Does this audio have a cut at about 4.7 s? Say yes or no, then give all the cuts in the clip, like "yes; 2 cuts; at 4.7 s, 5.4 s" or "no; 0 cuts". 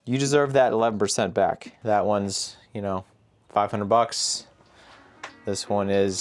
no; 1 cut; at 1.7 s